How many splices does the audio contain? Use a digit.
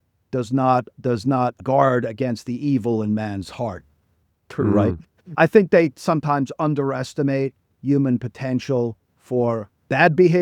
1